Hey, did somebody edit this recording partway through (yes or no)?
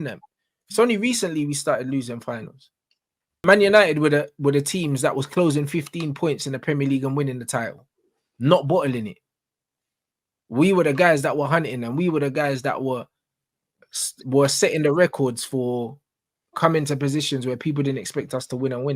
yes